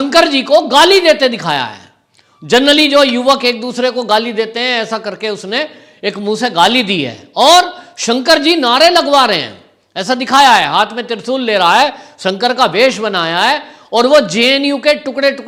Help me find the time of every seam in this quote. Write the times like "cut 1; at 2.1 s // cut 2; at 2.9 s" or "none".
none